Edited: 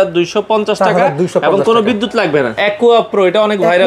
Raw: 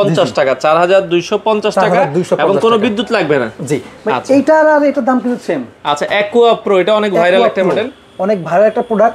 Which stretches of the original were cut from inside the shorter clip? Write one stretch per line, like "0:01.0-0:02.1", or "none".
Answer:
0:03.5-0:06.1